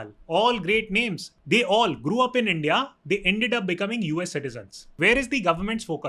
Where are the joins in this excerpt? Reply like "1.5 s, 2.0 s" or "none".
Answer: 1.3 s, 5.0 s